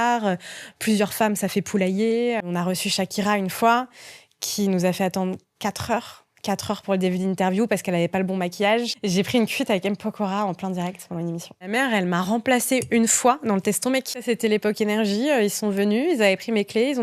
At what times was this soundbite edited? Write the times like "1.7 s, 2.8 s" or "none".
2.5 s, 9.0 s, 11.7 s, 14.2 s